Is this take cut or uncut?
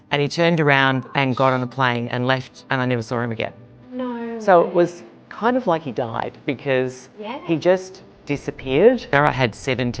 cut